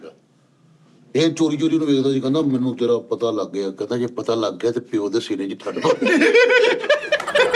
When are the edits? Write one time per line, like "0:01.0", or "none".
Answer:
none